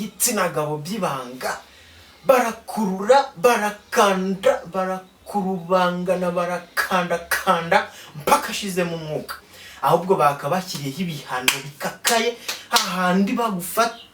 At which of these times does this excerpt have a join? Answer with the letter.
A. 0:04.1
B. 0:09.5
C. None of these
B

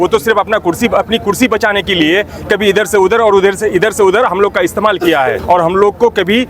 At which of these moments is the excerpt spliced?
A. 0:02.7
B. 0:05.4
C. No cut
B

